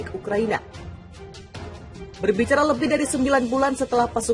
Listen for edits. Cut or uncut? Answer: cut